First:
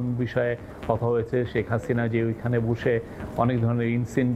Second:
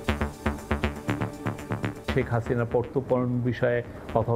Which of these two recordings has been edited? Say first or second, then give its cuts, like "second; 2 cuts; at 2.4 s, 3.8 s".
second; 1 cut; at 2.1 s